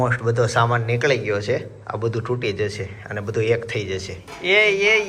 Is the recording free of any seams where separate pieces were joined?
no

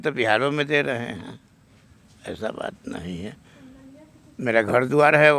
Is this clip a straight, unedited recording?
yes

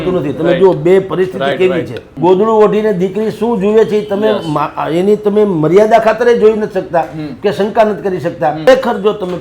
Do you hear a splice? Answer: yes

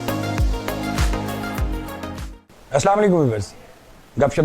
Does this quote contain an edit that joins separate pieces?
yes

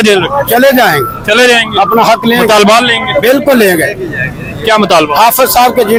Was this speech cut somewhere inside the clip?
no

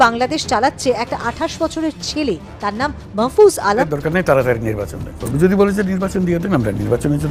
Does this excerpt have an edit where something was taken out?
yes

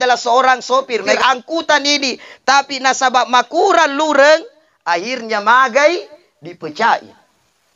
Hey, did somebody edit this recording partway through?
yes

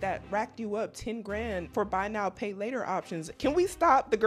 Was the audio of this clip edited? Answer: yes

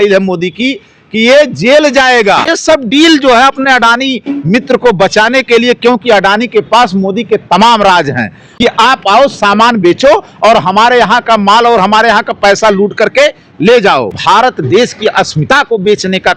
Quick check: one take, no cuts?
no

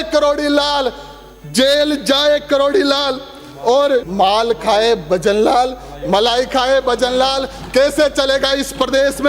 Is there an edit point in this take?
yes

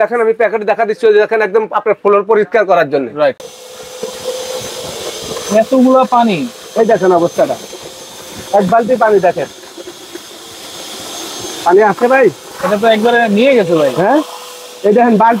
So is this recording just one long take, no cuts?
no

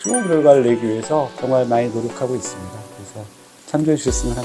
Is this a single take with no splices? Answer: no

